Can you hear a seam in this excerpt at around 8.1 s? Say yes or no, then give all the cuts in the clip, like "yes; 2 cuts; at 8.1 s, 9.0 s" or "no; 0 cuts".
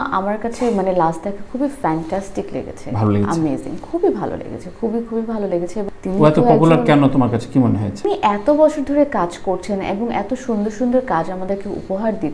yes; 2 cuts; at 5.9 s, 8.1 s